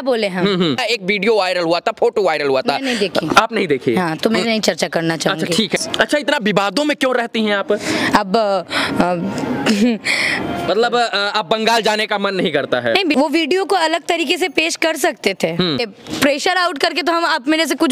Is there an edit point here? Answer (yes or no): yes